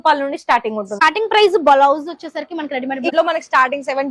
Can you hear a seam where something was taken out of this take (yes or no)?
yes